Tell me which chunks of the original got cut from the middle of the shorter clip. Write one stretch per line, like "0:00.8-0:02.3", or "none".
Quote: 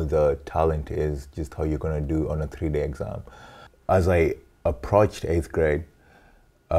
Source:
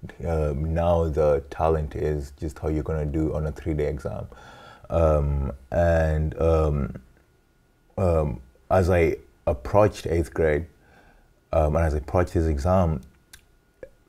0:04.7-0:08.5